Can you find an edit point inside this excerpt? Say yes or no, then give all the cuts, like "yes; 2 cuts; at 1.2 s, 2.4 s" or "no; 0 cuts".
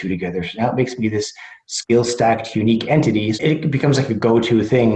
yes; 1 cut; at 3.4 s